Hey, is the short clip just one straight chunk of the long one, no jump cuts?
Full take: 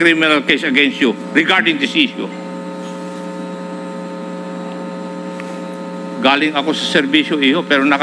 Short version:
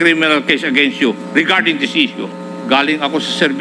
no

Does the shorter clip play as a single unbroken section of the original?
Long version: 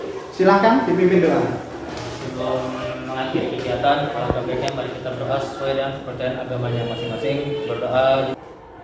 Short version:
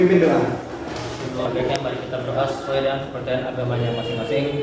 no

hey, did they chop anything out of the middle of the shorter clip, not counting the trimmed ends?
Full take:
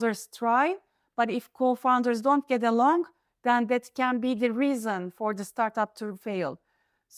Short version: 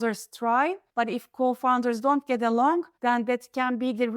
yes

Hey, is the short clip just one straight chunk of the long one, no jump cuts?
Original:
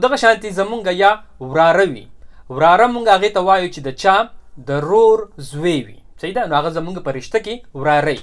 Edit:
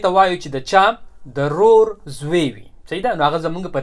yes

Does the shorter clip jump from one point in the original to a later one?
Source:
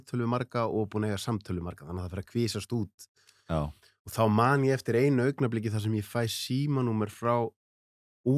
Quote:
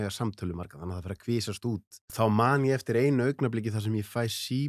yes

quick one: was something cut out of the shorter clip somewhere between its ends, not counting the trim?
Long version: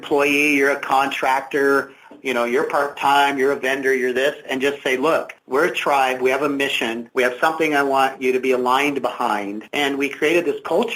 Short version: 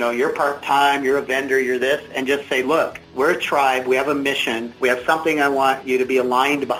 no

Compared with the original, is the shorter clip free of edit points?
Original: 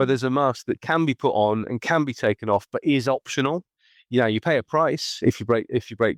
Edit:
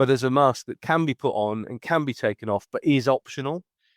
yes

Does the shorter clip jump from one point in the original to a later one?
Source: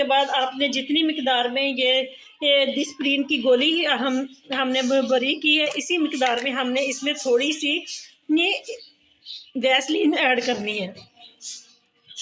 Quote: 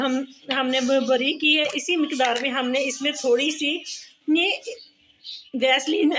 no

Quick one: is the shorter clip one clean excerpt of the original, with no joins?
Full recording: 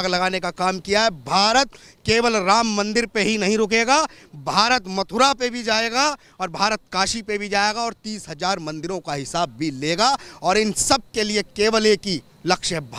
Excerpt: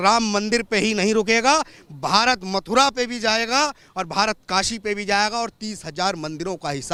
yes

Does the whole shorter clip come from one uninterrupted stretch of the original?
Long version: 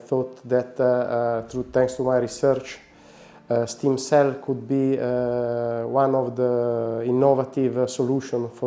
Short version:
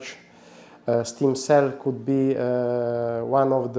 yes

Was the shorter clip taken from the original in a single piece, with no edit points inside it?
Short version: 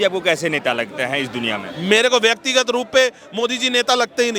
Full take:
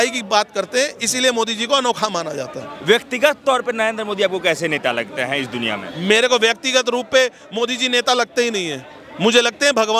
yes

